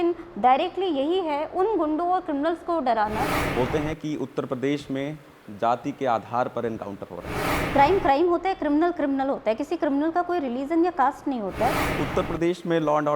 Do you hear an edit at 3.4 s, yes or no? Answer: yes